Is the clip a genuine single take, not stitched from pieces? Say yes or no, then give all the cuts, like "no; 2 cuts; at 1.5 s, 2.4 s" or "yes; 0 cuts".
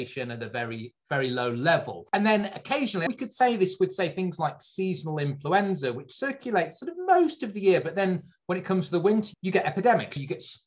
no; 3 cuts; at 2.0 s, 3.1 s, 9.4 s